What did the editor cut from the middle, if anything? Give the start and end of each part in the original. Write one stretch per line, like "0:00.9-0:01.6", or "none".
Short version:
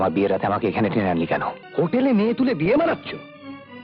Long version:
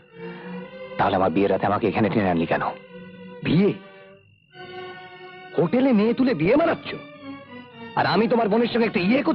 0:02.8-0:05.4